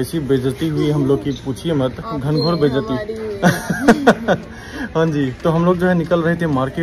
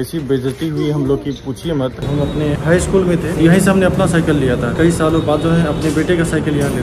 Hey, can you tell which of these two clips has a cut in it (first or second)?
second